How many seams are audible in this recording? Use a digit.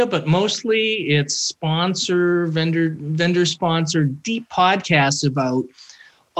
0